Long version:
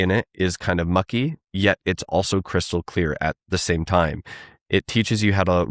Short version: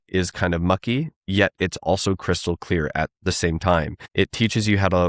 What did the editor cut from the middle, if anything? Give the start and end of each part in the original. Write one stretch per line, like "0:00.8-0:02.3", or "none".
0:04.2-0:04.5